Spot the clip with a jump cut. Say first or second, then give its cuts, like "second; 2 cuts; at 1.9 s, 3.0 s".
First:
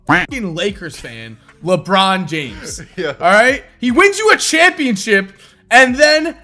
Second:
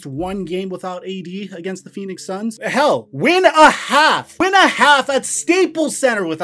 second; 2 cuts; at 2.6 s, 4.3 s